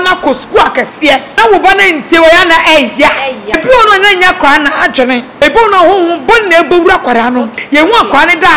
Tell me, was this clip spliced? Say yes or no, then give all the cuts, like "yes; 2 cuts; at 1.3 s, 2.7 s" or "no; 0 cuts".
yes; 4 cuts; at 1.3 s, 3.6 s, 5.4 s, 7.6 s